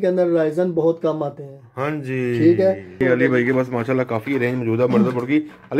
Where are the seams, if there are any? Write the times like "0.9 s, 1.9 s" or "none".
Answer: 3.0 s